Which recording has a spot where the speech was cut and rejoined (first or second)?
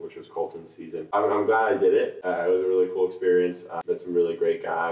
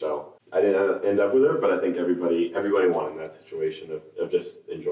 first